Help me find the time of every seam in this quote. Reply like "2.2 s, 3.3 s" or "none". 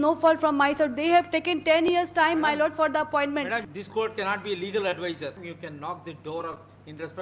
3.6 s, 5.4 s